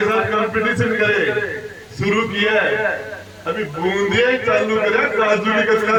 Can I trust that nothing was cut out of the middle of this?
yes; 0 cuts

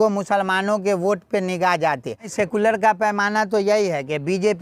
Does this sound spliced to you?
yes; 1 cut; at 2.3 s

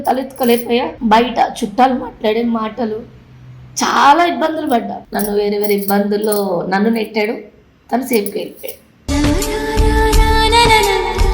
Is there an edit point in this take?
yes; 2 cuts; at 0.9 s, 5.0 s

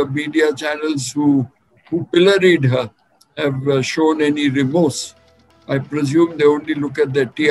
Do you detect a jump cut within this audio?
no; 0 cuts

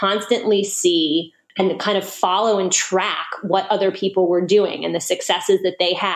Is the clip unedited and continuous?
no; 1 cut; at 1.4 s

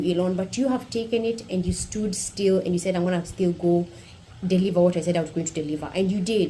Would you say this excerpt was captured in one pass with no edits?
yes; 0 cuts

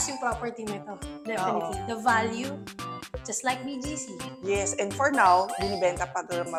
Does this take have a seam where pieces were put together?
no; 0 cuts

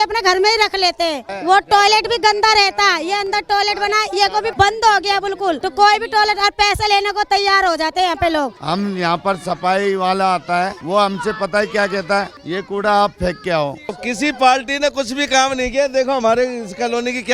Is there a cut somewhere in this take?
yes; 7 cuts; at 1.3 s, 4.5 s, 5.6 s, 8.6 s, 10.8 s, 12.4 s, 14.0 s

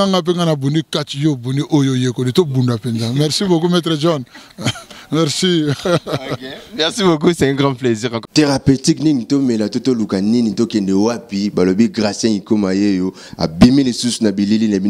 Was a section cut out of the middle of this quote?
yes; 1 cut; at 8.2 s

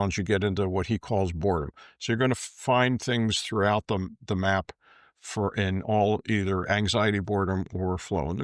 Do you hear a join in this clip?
no; 0 cuts

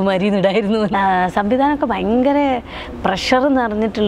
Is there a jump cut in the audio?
yes; 1 cut; at 0.9 s

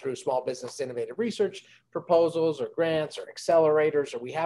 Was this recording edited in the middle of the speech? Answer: no; 0 cuts

